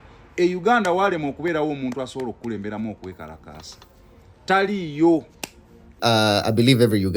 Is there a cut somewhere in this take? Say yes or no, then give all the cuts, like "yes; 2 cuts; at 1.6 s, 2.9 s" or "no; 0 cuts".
yes; 1 cut; at 6.0 s